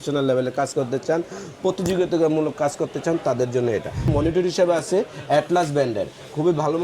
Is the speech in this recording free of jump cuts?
no; 1 cut; at 4.1 s

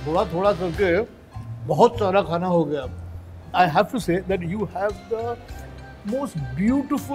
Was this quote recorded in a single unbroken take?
no; 1 cut; at 3.5 s

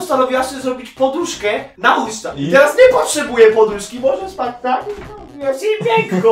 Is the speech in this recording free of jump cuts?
yes; 0 cuts

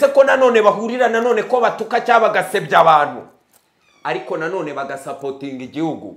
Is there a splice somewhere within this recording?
no; 0 cuts

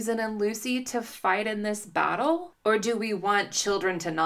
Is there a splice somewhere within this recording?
yes; 1 cut; at 2.5 s

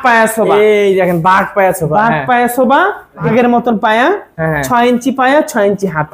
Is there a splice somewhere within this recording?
yes; 1 cut; at 3.3 s

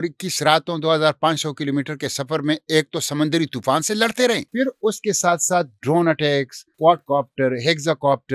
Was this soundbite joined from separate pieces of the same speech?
yes; 2 cuts; at 4.5 s, 6.6 s

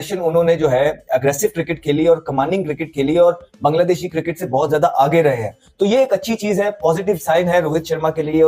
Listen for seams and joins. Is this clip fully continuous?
yes; 0 cuts

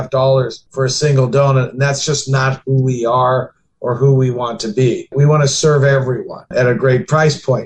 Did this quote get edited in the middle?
no; 0 cuts

